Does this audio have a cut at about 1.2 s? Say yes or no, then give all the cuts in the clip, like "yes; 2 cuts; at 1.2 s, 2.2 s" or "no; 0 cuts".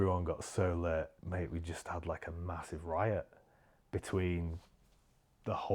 yes; 1 cut; at 1.2 s